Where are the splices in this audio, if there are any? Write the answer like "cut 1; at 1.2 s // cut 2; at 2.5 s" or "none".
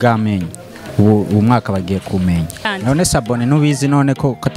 cut 1; at 2.7 s